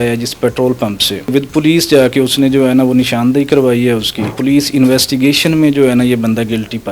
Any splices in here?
yes; 2 cuts; at 1.3 s, 4.3 s

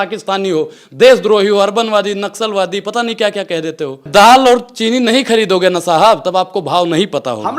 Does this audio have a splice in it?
yes; 1 cut; at 4.1 s

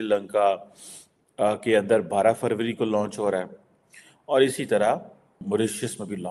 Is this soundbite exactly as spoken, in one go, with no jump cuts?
no; 1 cut; at 5.4 s

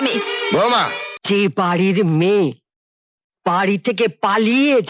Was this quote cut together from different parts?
yes; 1 cut; at 1.1 s

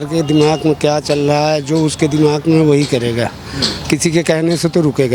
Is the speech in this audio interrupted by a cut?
no; 0 cuts

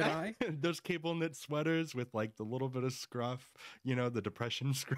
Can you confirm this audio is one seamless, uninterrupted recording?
yes; 0 cuts

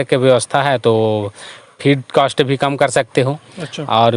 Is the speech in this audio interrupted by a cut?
no; 0 cuts

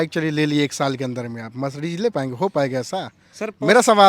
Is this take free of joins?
yes; 0 cuts

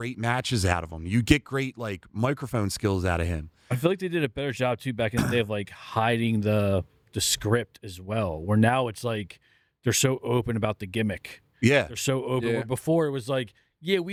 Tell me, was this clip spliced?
no; 0 cuts

